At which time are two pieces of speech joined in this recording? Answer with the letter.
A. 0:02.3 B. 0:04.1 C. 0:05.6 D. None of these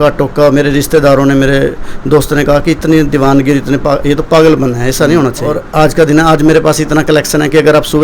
C